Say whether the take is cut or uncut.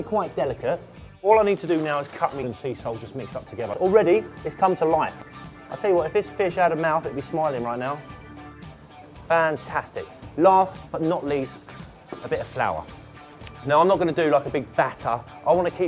uncut